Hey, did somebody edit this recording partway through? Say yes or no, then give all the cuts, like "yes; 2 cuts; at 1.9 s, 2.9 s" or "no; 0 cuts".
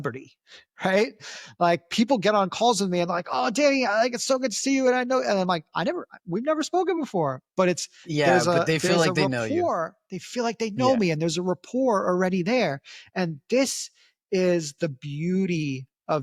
no; 0 cuts